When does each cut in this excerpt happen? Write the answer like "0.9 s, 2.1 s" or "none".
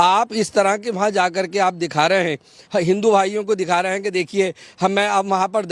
none